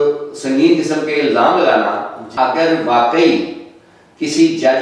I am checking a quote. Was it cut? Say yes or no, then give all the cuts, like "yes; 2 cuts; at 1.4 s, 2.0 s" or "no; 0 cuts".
yes; 1 cut; at 2.2 s